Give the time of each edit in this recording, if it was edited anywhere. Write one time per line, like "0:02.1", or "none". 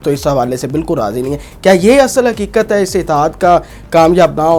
none